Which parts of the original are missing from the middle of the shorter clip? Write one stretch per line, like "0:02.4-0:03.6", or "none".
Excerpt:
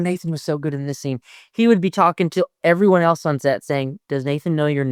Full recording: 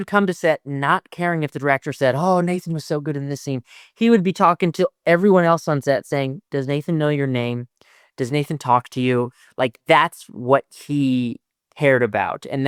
none